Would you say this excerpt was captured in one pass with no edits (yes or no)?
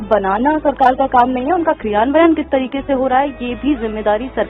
yes